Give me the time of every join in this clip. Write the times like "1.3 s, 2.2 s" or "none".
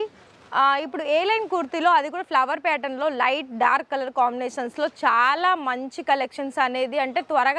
none

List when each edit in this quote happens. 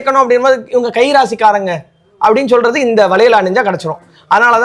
none

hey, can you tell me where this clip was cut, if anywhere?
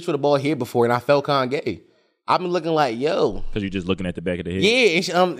none

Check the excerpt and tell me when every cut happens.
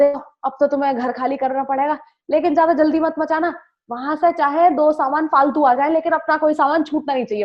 none

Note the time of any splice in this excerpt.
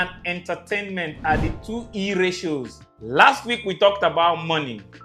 2.8 s

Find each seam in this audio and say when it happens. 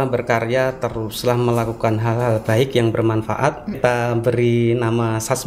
3.8 s

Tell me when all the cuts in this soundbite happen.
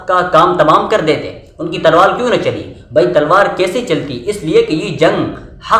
none

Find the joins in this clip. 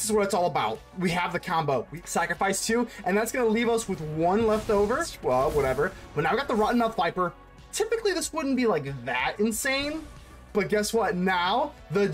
1.9 s, 5.1 s

